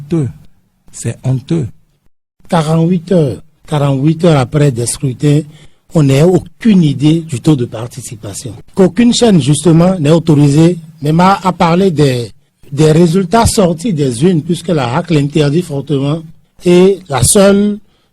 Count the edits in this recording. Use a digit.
1